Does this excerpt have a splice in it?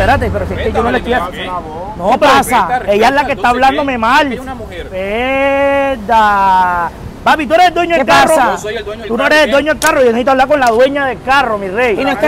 no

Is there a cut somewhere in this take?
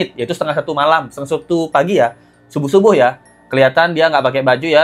no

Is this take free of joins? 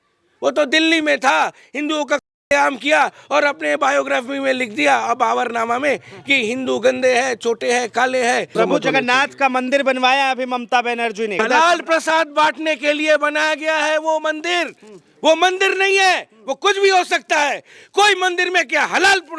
no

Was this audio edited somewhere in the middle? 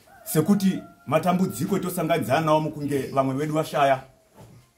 no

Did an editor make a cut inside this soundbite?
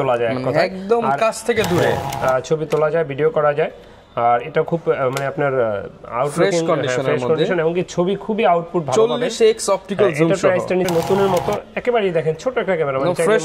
yes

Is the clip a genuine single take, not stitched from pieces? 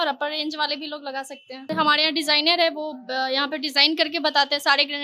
no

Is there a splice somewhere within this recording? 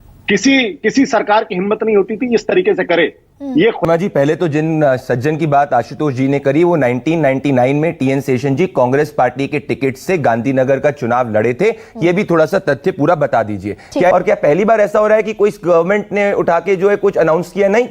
yes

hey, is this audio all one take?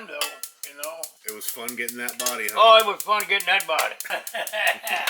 no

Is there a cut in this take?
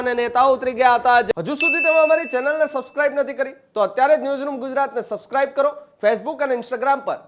yes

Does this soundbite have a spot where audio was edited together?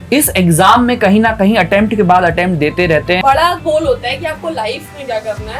yes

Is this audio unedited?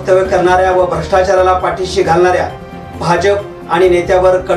yes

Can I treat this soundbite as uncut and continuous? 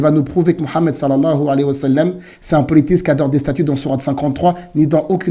yes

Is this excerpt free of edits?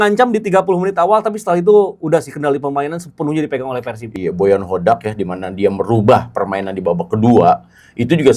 no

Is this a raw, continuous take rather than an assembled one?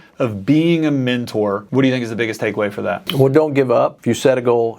no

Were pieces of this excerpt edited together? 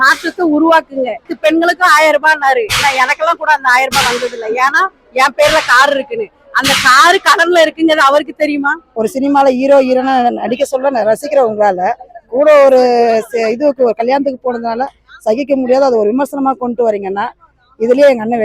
yes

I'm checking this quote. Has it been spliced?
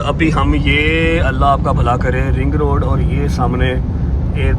no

